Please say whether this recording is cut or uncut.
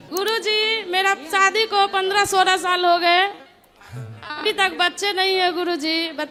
uncut